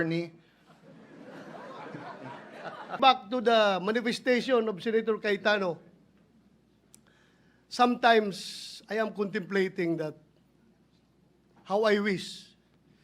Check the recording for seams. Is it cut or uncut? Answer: cut